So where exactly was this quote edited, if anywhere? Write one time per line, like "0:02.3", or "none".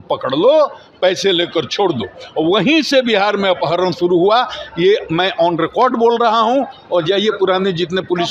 none